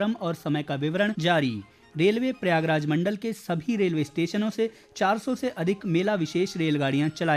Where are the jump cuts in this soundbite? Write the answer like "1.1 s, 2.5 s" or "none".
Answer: 1.2 s

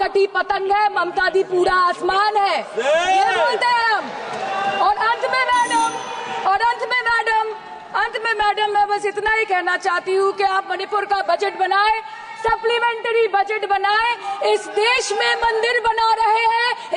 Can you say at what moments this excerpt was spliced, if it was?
none

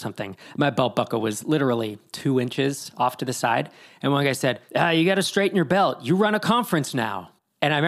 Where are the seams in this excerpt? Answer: 4.6 s

